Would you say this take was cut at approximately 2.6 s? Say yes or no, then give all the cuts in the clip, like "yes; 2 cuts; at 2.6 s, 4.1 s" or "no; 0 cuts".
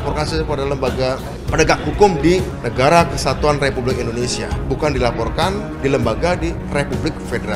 yes; 5 cuts; at 1.3 s, 2.6 s, 4.5 s, 5.7 s, 6.6 s